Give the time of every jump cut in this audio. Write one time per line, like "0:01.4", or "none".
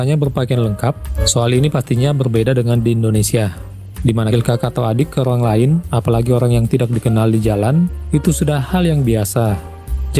0:01.1
0:04.3